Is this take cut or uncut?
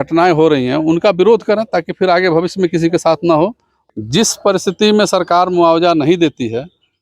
cut